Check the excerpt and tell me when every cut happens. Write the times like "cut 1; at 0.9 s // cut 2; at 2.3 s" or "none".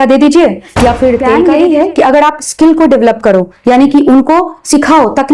cut 1; at 1.3 s